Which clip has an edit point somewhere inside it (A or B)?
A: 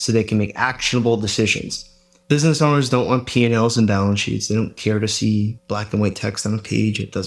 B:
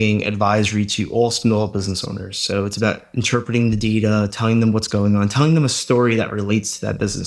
A